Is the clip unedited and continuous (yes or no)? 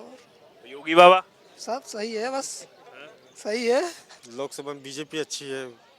no